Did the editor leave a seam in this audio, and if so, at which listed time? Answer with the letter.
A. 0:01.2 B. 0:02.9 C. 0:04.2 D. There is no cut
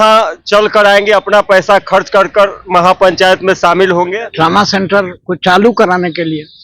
C